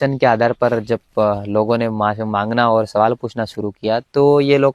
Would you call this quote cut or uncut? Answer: uncut